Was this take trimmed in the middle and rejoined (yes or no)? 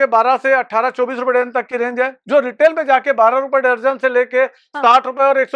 no